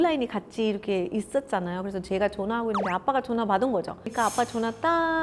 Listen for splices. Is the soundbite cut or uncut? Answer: cut